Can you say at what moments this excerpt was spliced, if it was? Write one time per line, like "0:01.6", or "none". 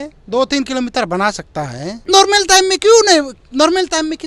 0:01.9